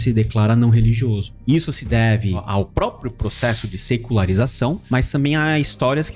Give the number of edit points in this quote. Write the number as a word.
three